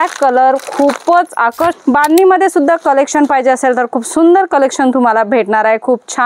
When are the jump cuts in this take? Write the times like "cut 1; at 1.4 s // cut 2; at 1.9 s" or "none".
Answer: cut 1; at 1.8 s